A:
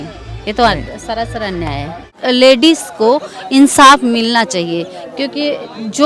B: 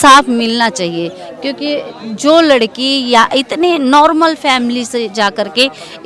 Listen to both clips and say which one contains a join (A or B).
A